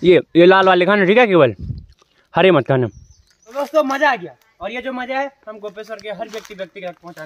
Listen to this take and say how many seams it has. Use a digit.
1